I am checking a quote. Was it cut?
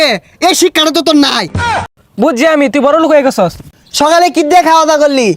yes; 2 cuts; at 1.9 s, 3.6 s

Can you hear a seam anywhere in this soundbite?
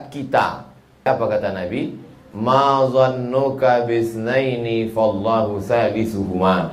yes; 1 cut; at 1.1 s

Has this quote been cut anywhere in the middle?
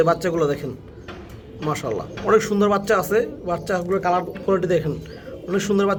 no; 0 cuts

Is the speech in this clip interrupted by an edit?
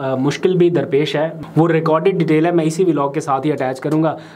yes; 1 cut; at 1.4 s

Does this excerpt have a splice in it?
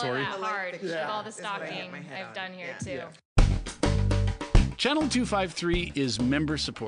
yes; 1 cut; at 3.2 s

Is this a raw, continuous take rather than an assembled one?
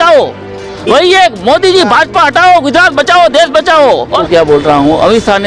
no; 1 cut; at 4.2 s

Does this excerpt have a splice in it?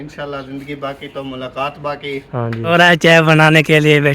yes; 1 cut; at 2.7 s

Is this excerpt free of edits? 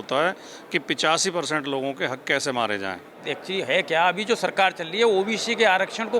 no; 1 cut; at 3.3 s

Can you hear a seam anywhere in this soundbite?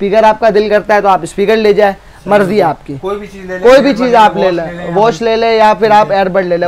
no; 0 cuts

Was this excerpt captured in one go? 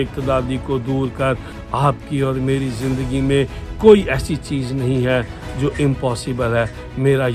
no; 1 cut; at 1.6 s

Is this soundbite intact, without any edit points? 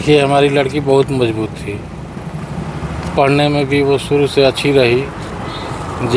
yes; 0 cuts

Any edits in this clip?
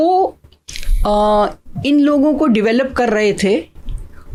no; 0 cuts

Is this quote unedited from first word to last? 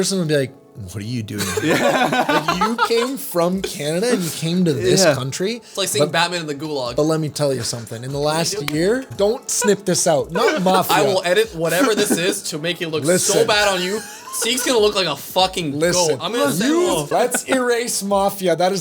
no; 2 cuts; at 9.1 s, 17.0 s

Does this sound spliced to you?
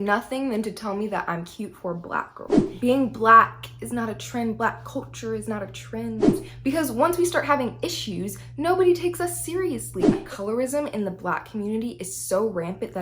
yes; 3 cuts; at 2.7 s, 6.5 s, 10.2 s

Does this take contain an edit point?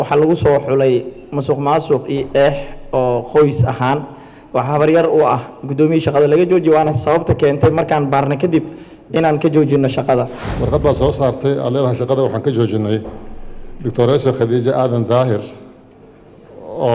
yes; 1 cut; at 10.4 s

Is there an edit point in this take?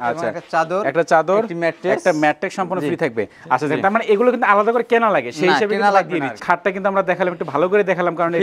no; 0 cuts

